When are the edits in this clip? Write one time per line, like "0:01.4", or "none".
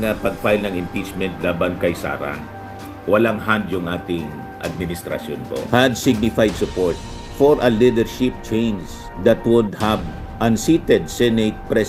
0:05.6